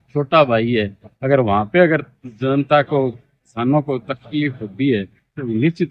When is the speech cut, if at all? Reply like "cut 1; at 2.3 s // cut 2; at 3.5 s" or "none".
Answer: none